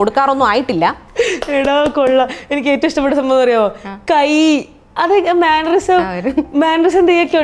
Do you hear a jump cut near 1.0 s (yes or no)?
yes